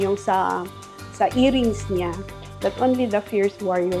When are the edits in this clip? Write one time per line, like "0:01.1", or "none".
none